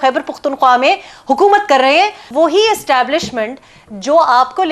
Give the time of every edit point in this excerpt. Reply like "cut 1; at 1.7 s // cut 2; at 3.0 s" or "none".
cut 1; at 2.2 s